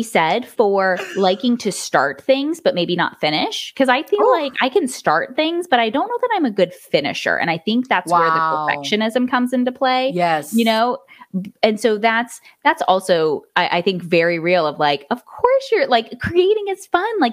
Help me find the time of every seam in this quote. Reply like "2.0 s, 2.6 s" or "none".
none